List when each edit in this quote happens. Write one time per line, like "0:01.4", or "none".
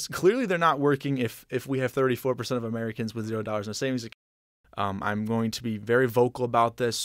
0:04.1